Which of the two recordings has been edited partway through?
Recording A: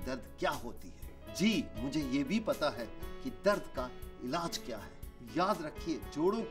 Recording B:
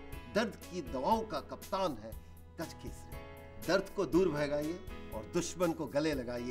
B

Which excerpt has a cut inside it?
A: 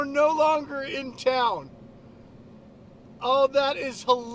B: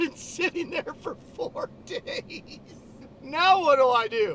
B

